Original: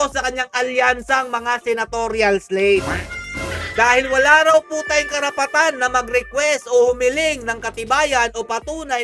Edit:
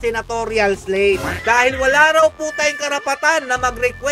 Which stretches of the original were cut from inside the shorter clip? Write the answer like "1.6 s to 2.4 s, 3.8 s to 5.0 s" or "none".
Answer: 3.0 s to 3.6 s